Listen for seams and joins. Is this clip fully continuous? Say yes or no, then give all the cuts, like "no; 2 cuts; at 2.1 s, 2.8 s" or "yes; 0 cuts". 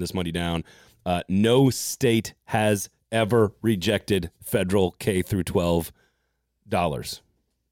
yes; 0 cuts